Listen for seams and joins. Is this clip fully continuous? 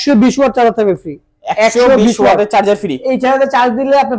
yes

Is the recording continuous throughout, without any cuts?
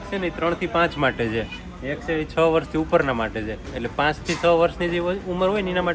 yes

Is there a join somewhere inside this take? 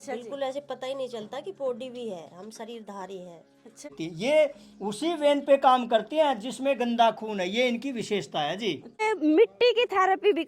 yes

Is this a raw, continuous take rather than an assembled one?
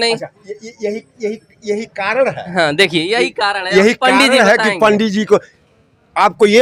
yes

